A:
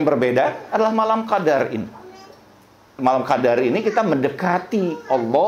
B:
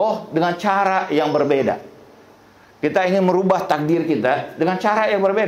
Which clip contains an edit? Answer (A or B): A